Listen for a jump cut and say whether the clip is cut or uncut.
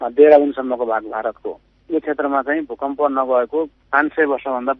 uncut